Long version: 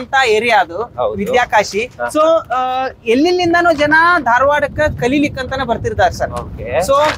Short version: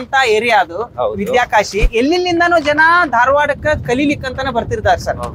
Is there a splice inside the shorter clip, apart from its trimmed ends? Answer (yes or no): yes